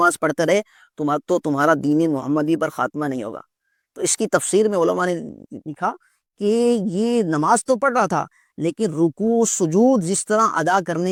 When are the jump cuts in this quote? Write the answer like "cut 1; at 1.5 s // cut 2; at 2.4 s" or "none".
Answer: none